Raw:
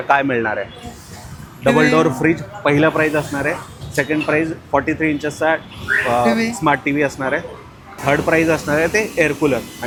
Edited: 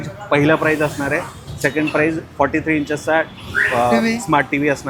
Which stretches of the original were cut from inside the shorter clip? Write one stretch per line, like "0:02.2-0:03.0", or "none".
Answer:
none

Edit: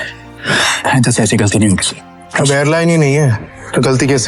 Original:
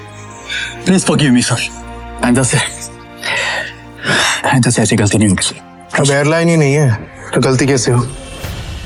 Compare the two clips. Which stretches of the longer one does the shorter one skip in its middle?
none

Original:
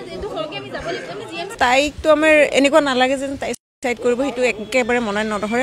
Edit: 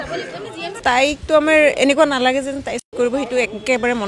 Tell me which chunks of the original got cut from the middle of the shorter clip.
0:03.7-0:04.0

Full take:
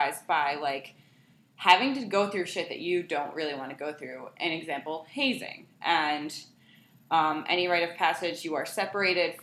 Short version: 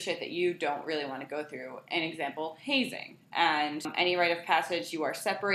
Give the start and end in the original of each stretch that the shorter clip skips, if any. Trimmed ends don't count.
0:06.4-0:07.4

